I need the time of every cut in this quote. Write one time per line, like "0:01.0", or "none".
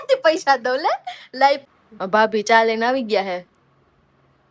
0:01.6